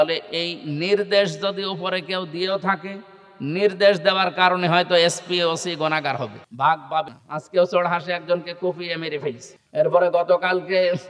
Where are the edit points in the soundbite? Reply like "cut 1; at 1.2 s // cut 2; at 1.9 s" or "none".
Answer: cut 1; at 6.4 s // cut 2; at 7.1 s // cut 3; at 9.5 s